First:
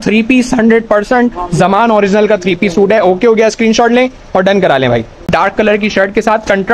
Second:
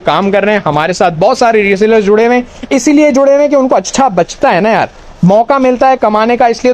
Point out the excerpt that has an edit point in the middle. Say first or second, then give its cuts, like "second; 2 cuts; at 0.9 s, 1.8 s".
first; 1 cut; at 5.3 s